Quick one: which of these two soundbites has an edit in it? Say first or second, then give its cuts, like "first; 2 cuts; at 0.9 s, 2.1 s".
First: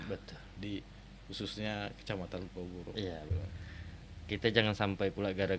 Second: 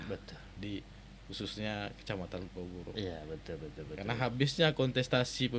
first; 1 cut; at 3.3 s